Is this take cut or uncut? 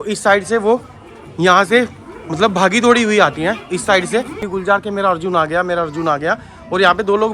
cut